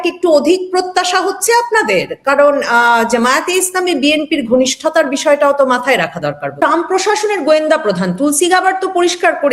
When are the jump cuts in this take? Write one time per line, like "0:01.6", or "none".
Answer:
0:06.6